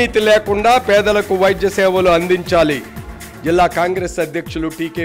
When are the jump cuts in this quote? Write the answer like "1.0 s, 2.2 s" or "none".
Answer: none